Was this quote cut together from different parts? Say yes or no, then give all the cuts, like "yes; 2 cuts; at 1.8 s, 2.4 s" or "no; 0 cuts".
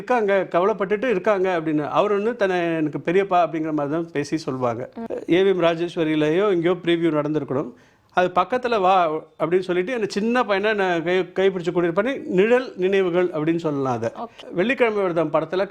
yes; 2 cuts; at 4.9 s, 14.4 s